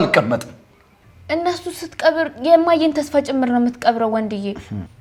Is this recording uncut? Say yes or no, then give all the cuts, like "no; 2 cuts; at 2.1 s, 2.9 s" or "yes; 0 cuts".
yes; 0 cuts